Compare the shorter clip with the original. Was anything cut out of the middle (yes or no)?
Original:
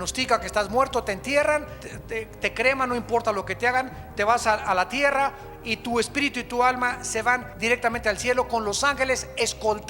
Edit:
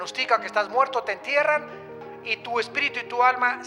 yes